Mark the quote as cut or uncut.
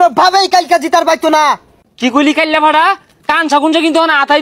cut